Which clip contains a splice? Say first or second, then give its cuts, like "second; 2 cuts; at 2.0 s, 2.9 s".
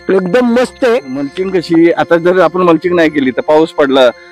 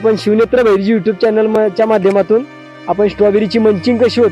first; 1 cut; at 1.4 s